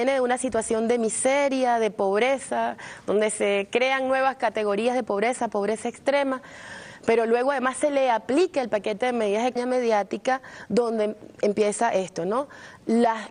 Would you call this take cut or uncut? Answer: uncut